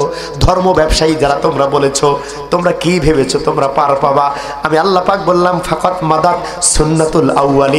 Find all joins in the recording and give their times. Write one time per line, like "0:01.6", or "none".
none